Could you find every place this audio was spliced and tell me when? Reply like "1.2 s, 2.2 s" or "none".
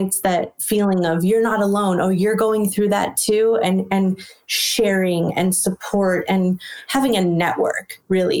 6.7 s